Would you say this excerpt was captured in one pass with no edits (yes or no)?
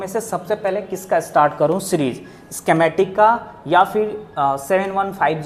yes